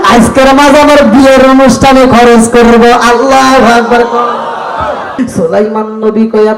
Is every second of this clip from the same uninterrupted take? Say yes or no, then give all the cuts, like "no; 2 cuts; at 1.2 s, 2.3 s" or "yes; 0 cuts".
no; 1 cut; at 5.2 s